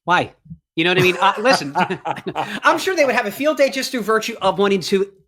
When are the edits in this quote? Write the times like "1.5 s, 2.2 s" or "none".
2.5 s